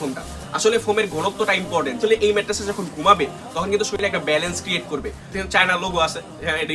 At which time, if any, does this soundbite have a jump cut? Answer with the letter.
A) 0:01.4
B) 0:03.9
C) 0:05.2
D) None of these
C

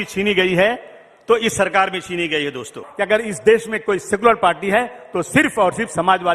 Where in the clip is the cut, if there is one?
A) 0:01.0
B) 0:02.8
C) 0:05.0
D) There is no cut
B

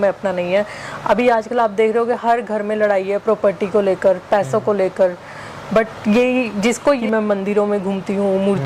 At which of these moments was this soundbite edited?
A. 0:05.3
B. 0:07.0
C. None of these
B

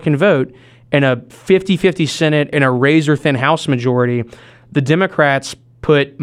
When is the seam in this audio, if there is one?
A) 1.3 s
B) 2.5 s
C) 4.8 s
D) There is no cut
B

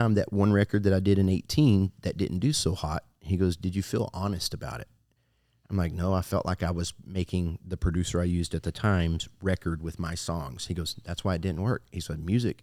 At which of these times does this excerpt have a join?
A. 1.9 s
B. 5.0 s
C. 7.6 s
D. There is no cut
D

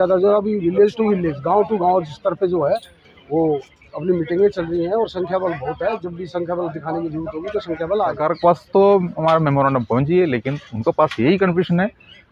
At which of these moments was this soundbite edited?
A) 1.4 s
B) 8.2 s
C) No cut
B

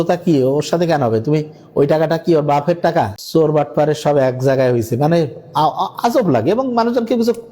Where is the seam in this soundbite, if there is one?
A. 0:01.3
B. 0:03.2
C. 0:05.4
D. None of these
B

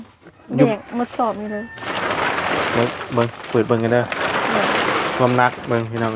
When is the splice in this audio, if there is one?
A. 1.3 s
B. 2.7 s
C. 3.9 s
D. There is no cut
D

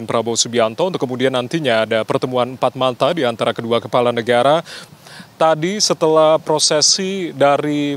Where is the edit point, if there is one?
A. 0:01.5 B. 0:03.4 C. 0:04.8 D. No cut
C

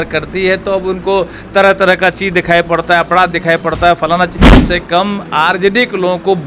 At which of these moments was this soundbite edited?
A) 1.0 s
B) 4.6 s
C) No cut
B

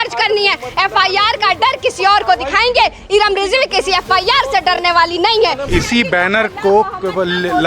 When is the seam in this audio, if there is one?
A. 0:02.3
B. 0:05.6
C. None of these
B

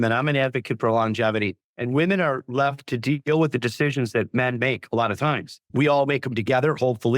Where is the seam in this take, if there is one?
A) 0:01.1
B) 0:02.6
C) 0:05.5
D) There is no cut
C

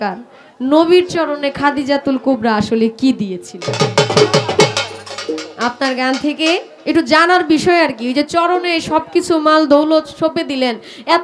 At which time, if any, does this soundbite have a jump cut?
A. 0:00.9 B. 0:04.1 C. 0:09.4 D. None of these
D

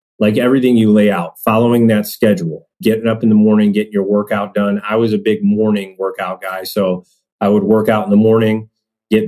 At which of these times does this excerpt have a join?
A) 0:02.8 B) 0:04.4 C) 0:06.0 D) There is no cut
A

